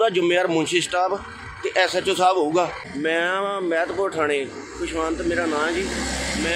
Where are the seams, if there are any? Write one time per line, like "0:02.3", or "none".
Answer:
0:02.7

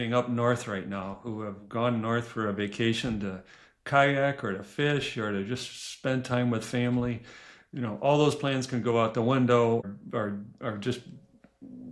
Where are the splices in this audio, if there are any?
0:09.8

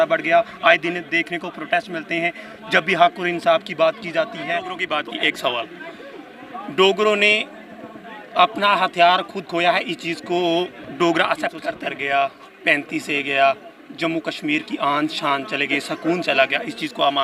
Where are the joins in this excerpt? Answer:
0:04.8
0:11.9

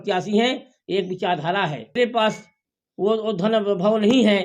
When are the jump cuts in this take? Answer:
0:02.0

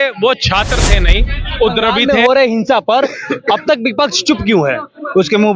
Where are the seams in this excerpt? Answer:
0:02.0

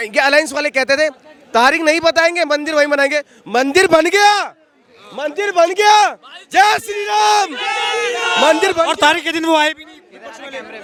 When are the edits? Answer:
none

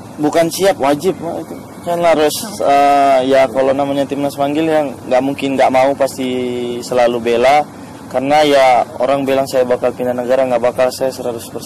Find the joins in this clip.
none

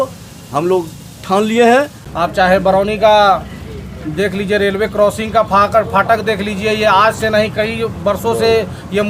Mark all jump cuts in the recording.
0:02.0

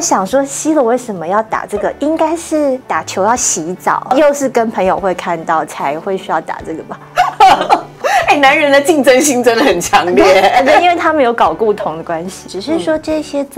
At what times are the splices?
0:02.8
0:04.1
0:08.0
0:12.3

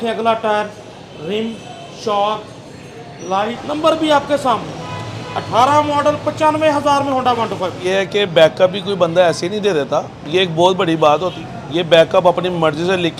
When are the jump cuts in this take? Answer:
0:03.6
0:07.8
0:11.3

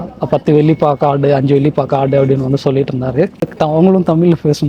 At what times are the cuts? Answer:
0:03.5

